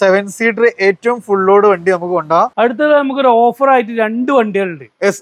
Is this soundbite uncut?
no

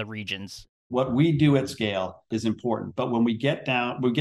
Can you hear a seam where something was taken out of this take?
yes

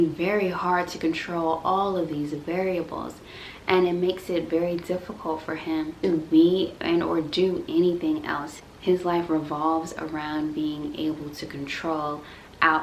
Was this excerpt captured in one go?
yes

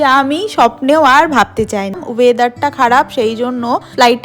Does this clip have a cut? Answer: yes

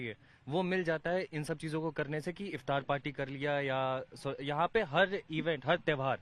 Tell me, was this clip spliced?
no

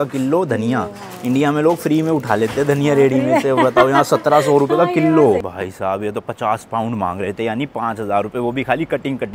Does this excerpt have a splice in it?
yes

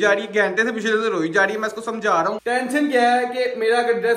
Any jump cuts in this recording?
yes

